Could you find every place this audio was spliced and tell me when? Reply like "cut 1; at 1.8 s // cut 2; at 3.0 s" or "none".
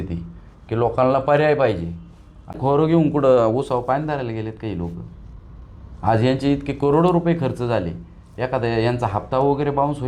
cut 1; at 2.6 s